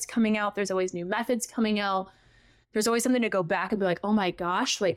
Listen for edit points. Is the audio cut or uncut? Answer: uncut